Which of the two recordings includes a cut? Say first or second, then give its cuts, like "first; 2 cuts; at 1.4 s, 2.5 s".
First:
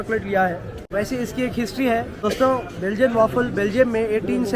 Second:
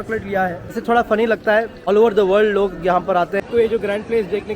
second; 3 cuts; at 0.7 s, 1.8 s, 3.4 s